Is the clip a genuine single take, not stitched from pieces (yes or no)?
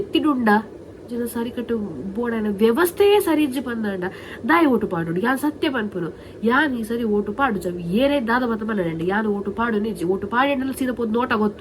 no